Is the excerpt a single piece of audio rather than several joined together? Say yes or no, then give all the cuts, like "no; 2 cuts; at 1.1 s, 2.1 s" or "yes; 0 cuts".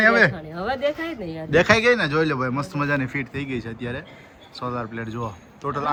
yes; 0 cuts